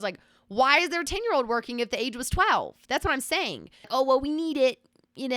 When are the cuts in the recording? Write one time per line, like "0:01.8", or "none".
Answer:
0:03.9